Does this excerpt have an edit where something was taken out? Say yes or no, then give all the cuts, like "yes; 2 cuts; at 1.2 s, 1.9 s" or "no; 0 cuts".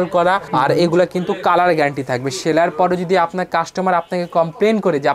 no; 0 cuts